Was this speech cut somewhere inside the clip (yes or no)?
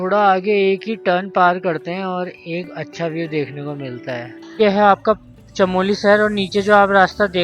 yes